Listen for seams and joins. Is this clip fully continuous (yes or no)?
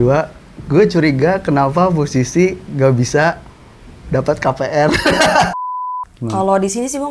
no